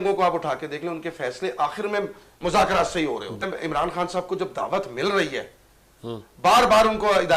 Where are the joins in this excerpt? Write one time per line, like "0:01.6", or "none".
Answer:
0:03.4